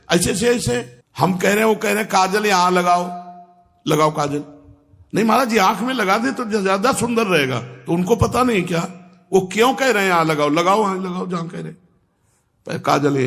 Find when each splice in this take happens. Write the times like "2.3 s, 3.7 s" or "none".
1.0 s